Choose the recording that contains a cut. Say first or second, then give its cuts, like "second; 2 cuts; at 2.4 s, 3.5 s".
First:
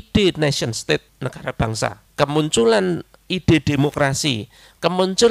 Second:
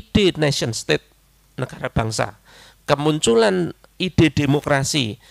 first; 1 cut; at 1.6 s